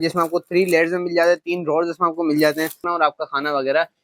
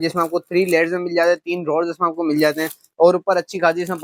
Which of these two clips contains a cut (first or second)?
first